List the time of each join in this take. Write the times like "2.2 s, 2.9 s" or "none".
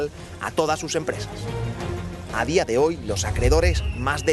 2.5 s